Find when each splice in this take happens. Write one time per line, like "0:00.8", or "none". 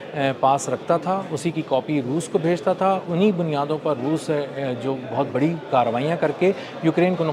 none